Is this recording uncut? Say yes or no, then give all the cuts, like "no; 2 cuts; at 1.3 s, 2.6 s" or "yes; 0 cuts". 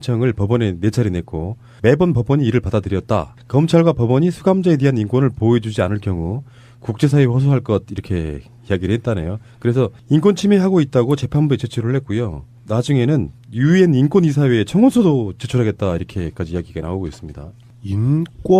yes; 0 cuts